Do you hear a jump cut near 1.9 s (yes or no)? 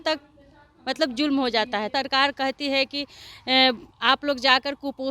yes